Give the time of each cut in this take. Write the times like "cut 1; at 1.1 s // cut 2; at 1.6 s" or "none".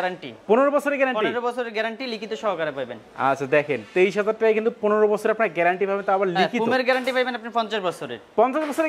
none